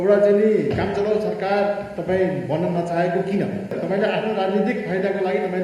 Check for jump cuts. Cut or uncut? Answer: cut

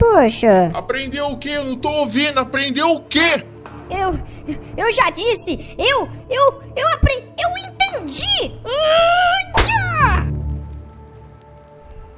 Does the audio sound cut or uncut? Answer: uncut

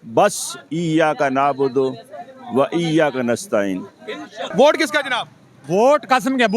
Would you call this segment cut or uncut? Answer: cut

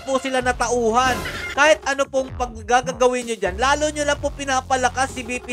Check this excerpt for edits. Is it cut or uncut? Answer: cut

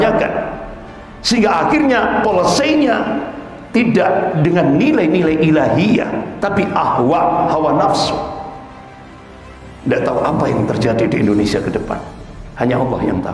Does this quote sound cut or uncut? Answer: cut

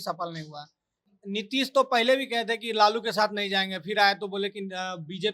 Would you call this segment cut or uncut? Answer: cut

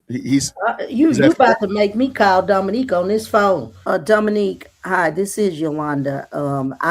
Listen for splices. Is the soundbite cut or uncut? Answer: cut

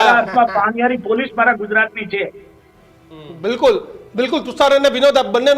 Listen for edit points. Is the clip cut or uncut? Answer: uncut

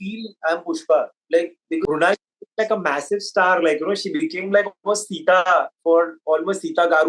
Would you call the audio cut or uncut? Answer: cut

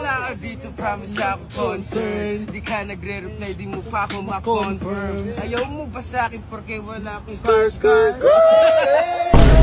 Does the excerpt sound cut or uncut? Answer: uncut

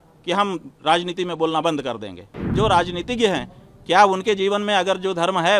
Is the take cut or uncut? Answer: cut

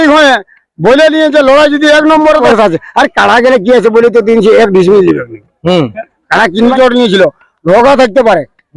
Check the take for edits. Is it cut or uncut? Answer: cut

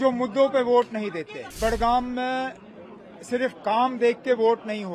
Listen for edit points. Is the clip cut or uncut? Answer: cut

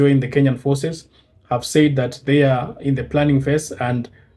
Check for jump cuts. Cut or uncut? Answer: uncut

